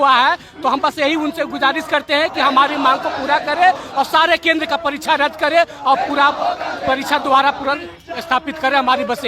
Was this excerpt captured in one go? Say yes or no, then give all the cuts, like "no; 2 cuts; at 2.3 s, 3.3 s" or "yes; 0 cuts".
yes; 0 cuts